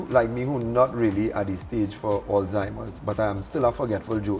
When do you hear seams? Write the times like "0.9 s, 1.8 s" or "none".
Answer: none